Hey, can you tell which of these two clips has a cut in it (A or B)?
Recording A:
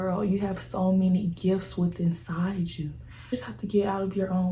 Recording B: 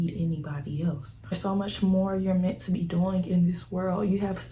B